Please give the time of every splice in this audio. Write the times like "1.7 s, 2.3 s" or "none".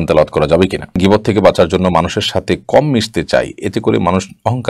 1.0 s